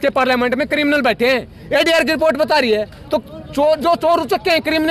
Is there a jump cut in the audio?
no; 0 cuts

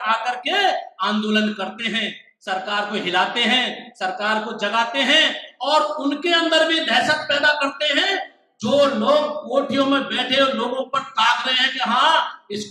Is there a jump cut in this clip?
no; 0 cuts

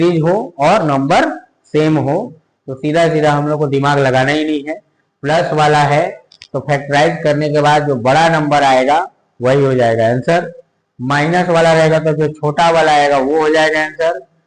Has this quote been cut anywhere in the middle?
no; 0 cuts

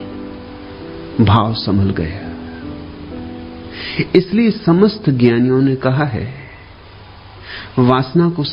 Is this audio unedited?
yes; 0 cuts

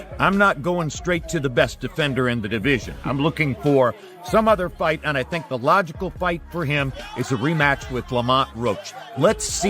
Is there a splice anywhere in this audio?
yes; 1 cut; at 8.8 s

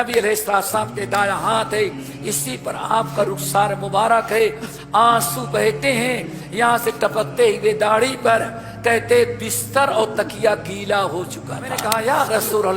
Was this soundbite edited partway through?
yes; 1 cut; at 11.8 s

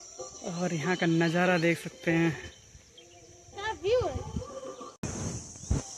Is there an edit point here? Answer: yes; 1 cut; at 5.1 s

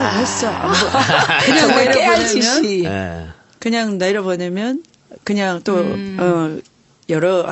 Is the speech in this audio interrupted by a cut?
no; 0 cuts

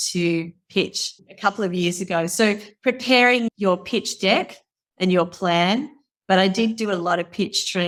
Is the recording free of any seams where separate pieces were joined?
yes; 0 cuts

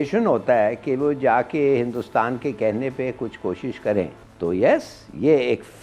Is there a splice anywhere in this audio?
yes; 1 cut; at 4.2 s

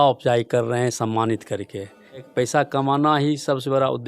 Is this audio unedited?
no; 1 cut; at 2.3 s

